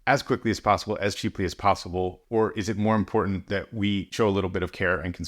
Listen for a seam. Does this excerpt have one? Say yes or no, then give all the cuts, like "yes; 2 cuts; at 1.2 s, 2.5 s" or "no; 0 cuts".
yes; 2 cuts; at 2.2 s, 4.1 s